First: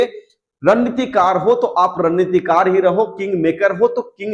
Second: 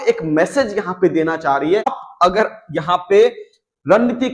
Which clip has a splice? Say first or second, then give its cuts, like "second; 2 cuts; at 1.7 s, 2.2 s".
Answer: second; 1 cut; at 2.0 s